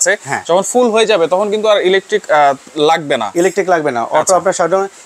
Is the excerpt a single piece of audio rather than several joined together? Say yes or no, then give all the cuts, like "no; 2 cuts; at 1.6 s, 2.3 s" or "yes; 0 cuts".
yes; 0 cuts